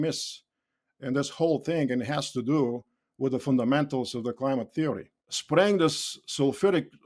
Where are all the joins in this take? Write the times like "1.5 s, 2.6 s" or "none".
5.3 s